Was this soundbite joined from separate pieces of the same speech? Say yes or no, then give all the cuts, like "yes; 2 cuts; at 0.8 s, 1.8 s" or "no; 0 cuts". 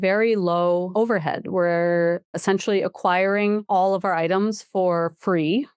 yes; 3 cuts; at 0.9 s, 2.4 s, 3.6 s